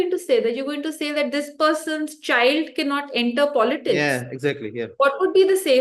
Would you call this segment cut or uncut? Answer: uncut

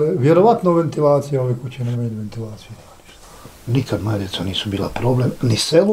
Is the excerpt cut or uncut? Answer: cut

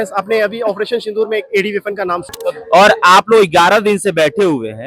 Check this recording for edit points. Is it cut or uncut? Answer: cut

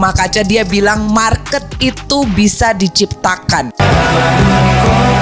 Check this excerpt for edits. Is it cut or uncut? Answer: uncut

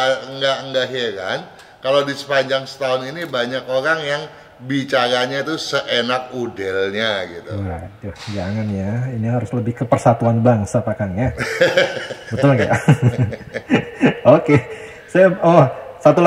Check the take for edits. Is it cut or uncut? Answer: uncut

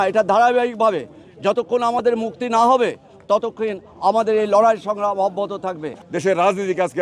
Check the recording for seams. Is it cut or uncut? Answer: cut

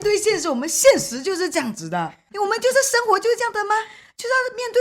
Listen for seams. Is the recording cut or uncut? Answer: cut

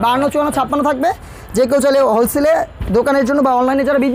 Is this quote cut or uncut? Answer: uncut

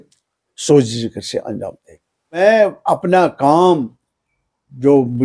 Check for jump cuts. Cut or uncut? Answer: cut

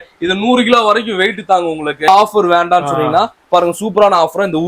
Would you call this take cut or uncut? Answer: cut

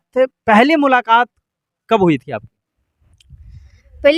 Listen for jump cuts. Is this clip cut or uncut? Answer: uncut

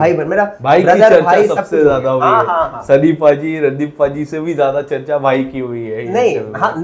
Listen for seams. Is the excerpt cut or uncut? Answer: uncut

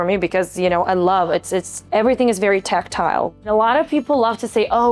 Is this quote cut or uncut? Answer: cut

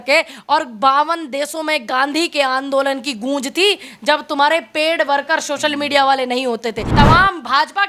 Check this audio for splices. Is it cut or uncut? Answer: cut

